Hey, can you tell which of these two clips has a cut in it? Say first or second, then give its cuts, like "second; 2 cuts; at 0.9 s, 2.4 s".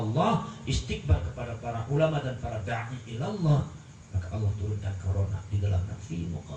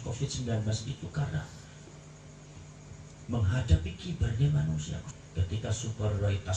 second; 1 cut; at 5.0 s